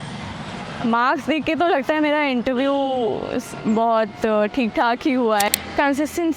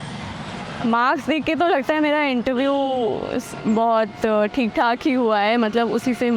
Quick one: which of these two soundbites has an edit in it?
first; 1 cut; at 5.5 s

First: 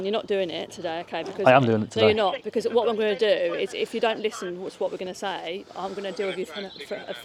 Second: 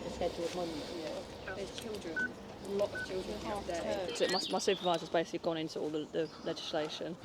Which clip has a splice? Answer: second; 2 cuts; at 1.3 s, 4.1 s

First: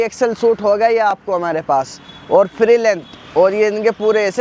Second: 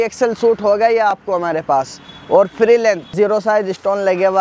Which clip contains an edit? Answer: second; 1 cut; at 3.1 s

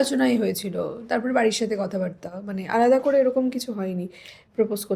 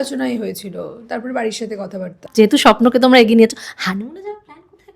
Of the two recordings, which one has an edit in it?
second; 1 cut; at 2.3 s

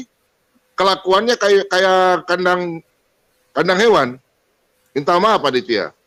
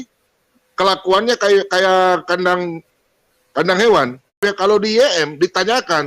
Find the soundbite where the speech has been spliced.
second; 1 cut; at 4.4 s

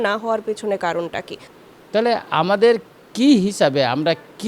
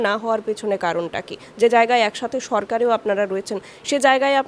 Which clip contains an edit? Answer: first; 1 cut; at 1.4 s

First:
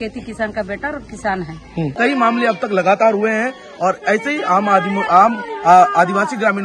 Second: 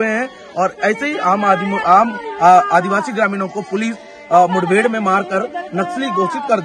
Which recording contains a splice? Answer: first; 1 cut; at 1.9 s

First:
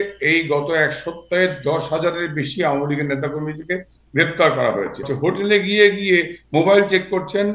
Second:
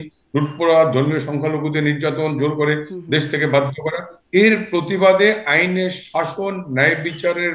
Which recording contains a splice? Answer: first; 1 cut; at 5.1 s

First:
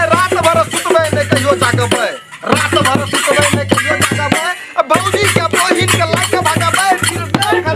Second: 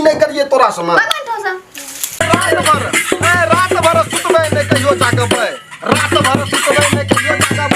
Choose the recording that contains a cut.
second; 1 cut; at 2.2 s

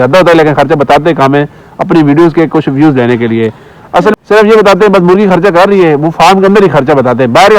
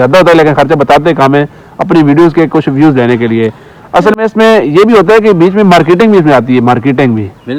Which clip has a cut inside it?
first; 1 cut; at 4.2 s

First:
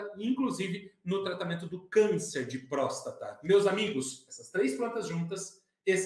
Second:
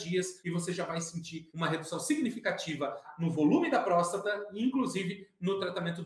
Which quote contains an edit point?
second; 2 cuts; at 1.4 s, 3.1 s

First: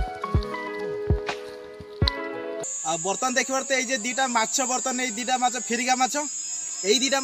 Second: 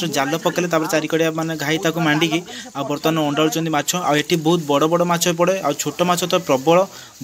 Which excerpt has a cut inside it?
first; 1 cut; at 2.6 s

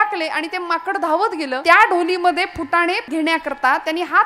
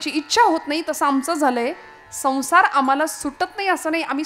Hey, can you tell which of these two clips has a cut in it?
first; 2 cuts; at 1.6 s, 3.1 s

